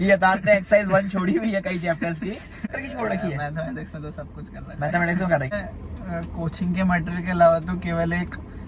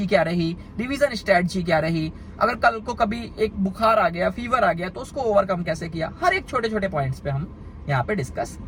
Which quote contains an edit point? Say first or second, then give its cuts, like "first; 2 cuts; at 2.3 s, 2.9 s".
first; 2 cuts; at 2.8 s, 5.5 s